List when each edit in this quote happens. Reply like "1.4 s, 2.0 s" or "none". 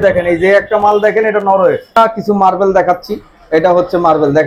1.8 s